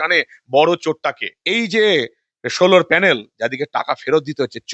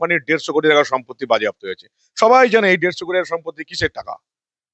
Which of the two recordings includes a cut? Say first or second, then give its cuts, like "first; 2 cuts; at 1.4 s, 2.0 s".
first; 1 cut; at 1.4 s